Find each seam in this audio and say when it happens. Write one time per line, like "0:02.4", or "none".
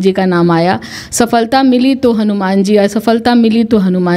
none